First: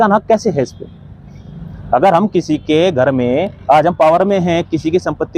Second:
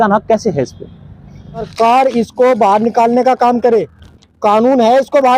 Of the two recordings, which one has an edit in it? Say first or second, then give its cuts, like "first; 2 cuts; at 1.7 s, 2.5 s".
second; 1 cut; at 1.7 s